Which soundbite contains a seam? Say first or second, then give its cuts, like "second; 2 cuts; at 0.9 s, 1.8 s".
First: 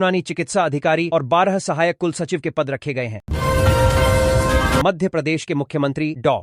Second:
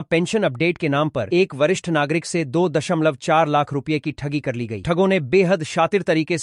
first; 2 cuts; at 3.2 s, 4.7 s